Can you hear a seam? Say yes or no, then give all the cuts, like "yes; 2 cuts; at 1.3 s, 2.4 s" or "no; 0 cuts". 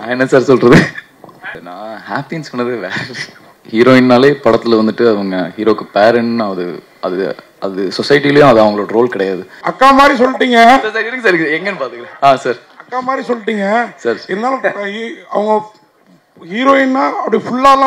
yes; 3 cuts; at 1.6 s, 3.5 s, 9.6 s